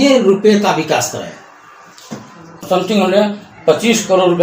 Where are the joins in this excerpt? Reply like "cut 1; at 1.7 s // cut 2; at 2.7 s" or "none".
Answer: cut 1; at 2.6 s